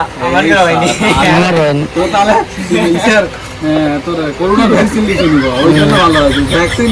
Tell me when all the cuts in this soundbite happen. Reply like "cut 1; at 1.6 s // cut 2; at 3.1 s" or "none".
none